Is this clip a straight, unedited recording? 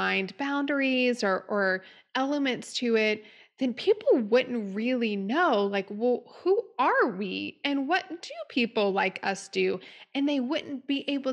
yes; 0 cuts

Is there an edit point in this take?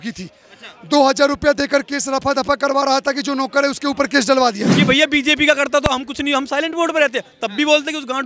yes; 1 cut; at 4.6 s

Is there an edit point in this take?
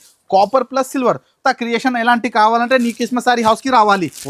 yes; 1 cut; at 1.3 s

